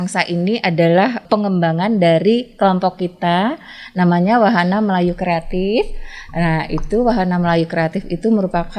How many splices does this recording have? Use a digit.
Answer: 1